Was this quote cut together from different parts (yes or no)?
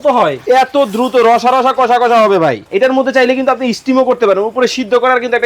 yes